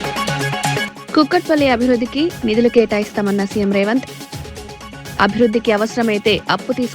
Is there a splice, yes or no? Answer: yes